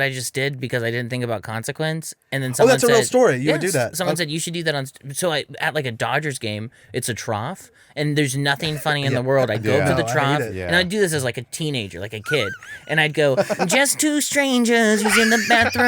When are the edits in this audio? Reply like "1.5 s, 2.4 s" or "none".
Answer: none